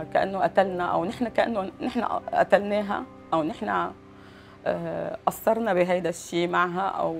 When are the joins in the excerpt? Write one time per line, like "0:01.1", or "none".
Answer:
none